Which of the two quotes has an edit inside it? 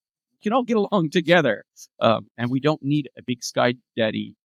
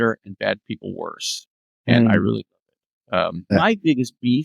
second; 1 cut; at 3.5 s

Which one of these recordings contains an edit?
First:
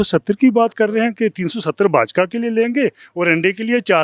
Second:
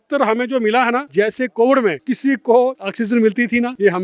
second; 3 cuts; at 1.1 s, 2.1 s, 3.2 s

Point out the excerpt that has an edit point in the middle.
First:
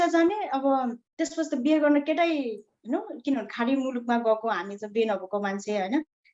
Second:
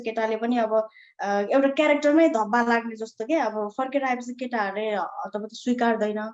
first; 1 cut; at 1.0 s

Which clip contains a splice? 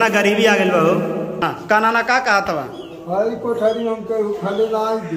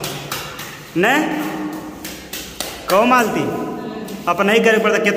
first; 1 cut; at 1.5 s

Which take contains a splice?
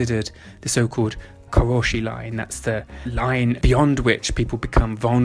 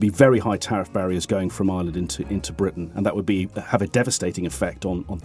first; 2 cuts; at 1.4 s, 3.4 s

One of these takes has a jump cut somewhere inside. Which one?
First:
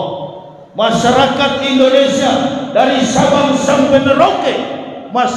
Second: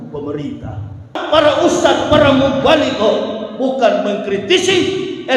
second; 1 cut; at 1.2 s

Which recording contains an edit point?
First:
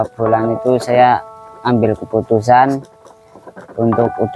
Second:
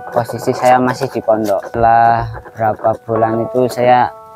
second; 1 cut; at 1.7 s

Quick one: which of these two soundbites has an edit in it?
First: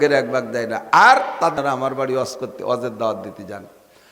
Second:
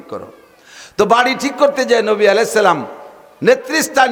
first; 1 cut; at 1.5 s

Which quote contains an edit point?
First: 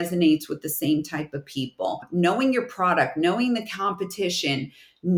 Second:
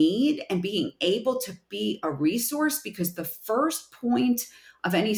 first; 1 cut; at 2.0 s

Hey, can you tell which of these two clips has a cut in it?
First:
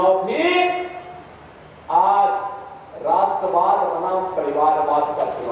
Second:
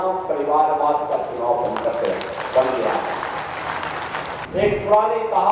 second; 1 cut; at 4.3 s

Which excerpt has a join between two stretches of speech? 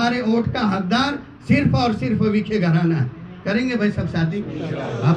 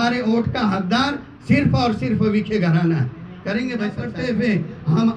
second; 1 cut; at 4.1 s

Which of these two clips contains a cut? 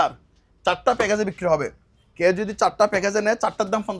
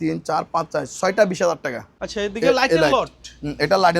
second; 1 cut; at 1.9 s

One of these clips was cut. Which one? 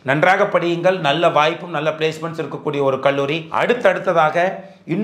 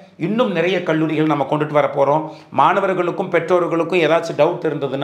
first; 1 cut; at 3.4 s

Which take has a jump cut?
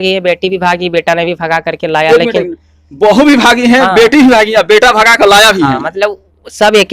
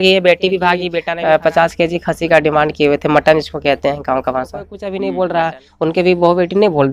second; 2 cuts; at 0.9 s, 4.8 s

